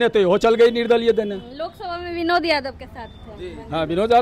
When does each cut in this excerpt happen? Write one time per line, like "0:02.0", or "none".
none